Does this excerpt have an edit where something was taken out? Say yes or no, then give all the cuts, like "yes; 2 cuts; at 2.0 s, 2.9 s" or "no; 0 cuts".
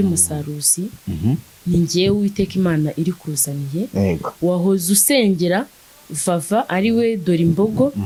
no; 0 cuts